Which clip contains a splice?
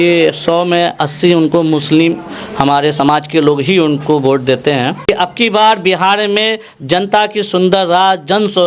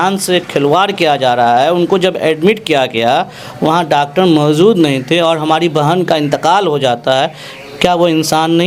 first; 1 cut; at 5.0 s

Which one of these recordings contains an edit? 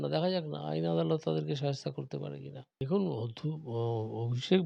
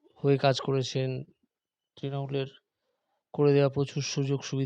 first; 1 cut; at 2.6 s

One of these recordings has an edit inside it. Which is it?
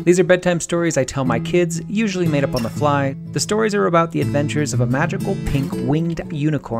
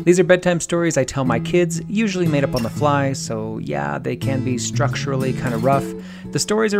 first; 1 cut; at 3.2 s

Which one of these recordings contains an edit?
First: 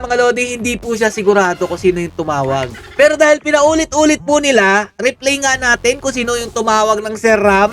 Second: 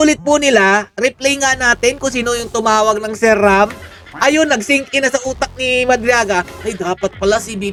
first; 1 cut; at 2.8 s

